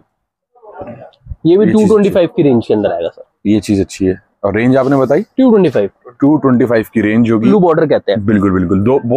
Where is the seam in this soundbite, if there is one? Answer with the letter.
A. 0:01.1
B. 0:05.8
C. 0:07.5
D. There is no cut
C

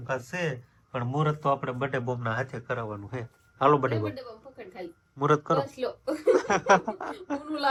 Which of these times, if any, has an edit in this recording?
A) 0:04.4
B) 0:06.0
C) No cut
C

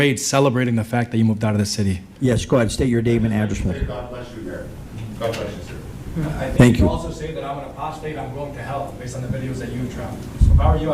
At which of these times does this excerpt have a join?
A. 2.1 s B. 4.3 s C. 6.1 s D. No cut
A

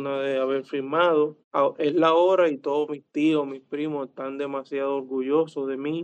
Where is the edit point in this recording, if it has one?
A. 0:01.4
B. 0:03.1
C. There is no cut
A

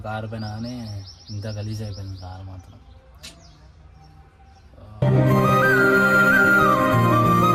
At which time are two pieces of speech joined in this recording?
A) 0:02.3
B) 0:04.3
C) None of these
C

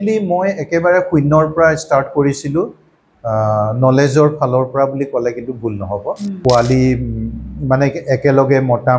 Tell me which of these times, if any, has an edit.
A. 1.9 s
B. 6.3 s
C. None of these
B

